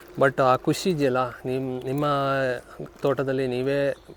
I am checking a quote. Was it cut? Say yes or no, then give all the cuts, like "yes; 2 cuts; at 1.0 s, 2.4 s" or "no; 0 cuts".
no; 0 cuts